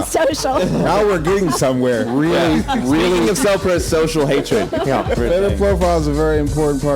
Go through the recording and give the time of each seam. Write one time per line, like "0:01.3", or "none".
0:05.2